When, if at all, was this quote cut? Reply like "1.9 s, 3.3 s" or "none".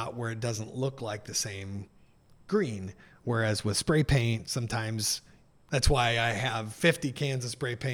none